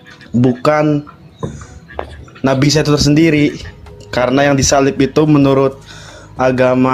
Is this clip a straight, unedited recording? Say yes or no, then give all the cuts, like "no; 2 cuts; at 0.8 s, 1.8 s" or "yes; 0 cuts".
yes; 0 cuts